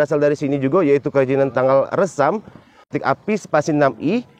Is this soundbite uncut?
no; 1 cut; at 2.9 s

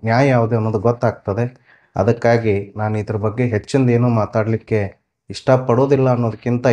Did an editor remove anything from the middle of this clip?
no; 0 cuts

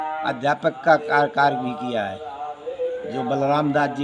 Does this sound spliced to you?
no; 0 cuts

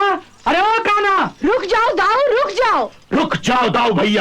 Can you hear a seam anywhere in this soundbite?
no; 0 cuts

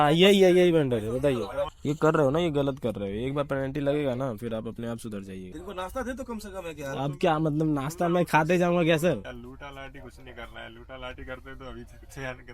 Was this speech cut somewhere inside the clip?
yes; 3 cuts; at 1.7 s, 5.5 s, 9.3 s

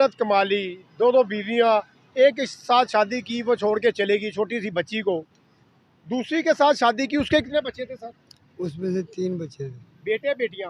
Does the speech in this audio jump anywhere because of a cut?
no; 0 cuts

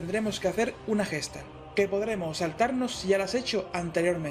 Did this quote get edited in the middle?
no; 0 cuts

